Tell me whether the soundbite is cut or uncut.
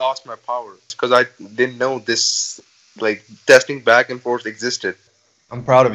cut